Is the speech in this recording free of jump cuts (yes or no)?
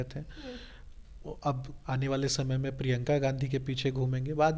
yes